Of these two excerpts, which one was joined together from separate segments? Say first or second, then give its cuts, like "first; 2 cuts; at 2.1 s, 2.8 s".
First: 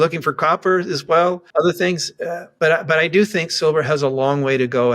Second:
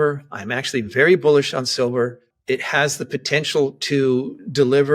first; 2 cuts; at 1.4 s, 2.4 s